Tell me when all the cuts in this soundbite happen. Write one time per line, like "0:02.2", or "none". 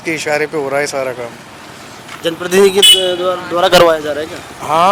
none